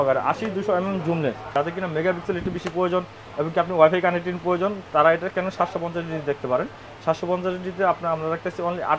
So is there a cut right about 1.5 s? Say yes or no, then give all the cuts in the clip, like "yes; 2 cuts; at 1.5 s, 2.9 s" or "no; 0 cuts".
yes; 1 cut; at 1.5 s